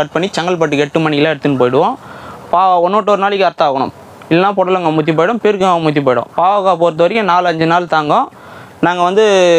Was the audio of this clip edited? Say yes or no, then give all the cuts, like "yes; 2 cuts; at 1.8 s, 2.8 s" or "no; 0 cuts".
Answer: no; 0 cuts